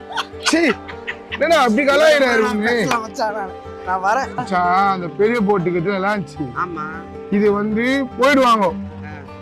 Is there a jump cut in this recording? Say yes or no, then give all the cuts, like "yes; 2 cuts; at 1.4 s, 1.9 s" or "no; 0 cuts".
yes; 1 cut; at 4.4 s